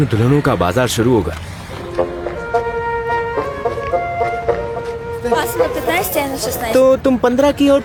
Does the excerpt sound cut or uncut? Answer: uncut